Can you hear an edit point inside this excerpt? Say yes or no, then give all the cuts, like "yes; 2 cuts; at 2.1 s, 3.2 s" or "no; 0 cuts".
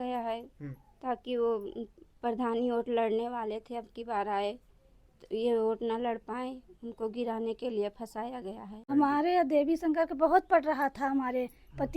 yes; 1 cut; at 8.8 s